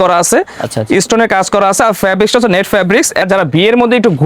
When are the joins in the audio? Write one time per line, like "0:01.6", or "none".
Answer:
0:03.2